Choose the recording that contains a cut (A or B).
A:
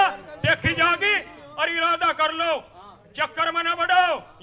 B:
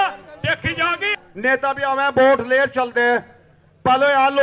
B